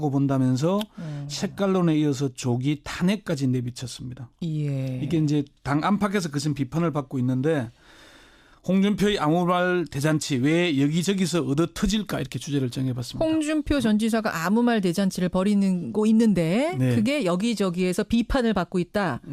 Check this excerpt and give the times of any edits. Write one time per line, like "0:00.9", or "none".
none